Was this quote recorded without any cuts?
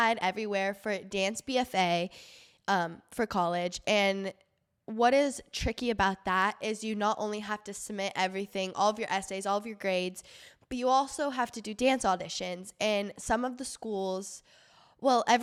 yes; 0 cuts

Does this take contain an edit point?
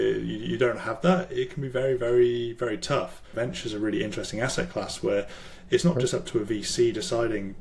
yes; 1 cut; at 3.2 s

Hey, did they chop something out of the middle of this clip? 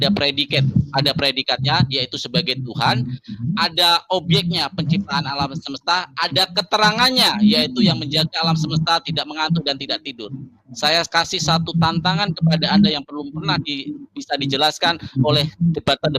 no; 0 cuts

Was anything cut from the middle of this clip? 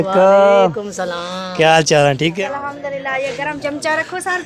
yes; 1 cut; at 2.4 s

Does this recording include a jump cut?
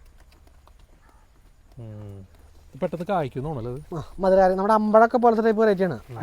no; 0 cuts

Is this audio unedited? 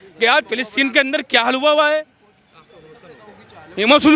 yes; 0 cuts

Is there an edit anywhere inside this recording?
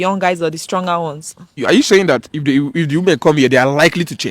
yes; 1 cut; at 1.6 s

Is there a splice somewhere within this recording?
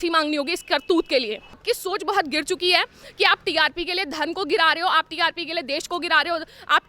yes; 1 cut; at 1.6 s

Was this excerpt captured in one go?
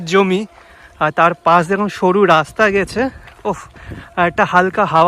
yes; 0 cuts

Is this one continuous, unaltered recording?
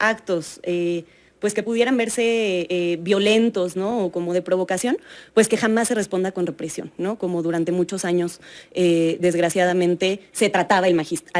yes; 0 cuts

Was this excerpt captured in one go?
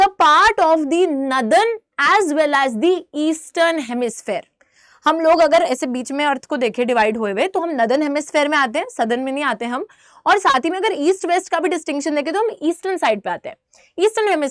yes; 0 cuts

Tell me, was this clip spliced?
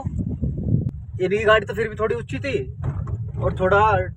yes; 1 cut; at 1.0 s

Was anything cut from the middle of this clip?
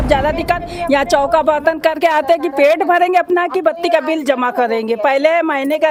no; 0 cuts

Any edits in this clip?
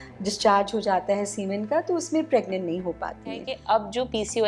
yes; 1 cut; at 3.5 s

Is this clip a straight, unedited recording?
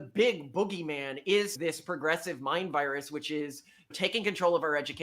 yes; 0 cuts

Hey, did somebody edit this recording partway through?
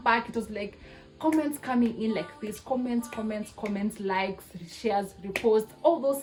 no; 0 cuts

